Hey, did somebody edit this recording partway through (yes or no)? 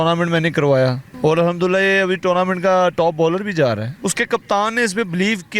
yes